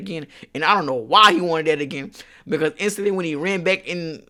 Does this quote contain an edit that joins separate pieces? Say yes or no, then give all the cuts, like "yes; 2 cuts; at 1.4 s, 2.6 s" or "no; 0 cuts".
no; 0 cuts